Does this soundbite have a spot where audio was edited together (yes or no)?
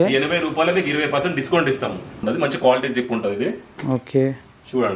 yes